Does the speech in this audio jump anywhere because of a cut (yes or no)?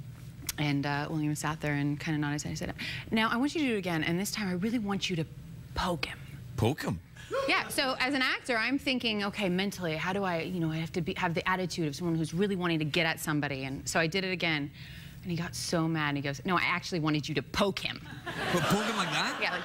yes